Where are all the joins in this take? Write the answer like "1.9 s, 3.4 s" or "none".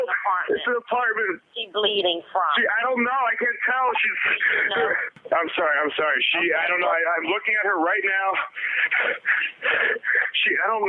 1.5 s, 5.1 s